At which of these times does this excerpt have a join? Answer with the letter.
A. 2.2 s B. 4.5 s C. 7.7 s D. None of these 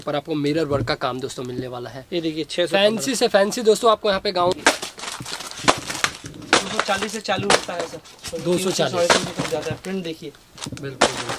B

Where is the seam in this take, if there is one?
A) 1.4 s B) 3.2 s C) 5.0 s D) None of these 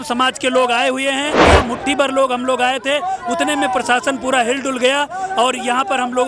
A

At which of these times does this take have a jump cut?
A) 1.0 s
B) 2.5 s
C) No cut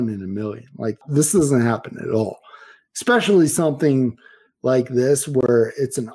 A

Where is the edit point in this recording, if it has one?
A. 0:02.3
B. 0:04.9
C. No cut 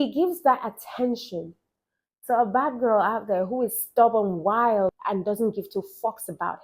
B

